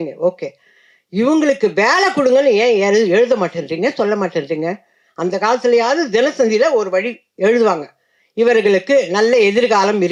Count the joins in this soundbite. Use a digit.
0